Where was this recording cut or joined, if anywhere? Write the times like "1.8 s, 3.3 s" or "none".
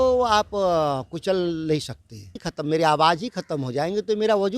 2.4 s